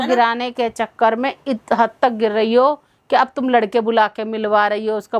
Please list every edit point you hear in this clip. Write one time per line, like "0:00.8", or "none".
none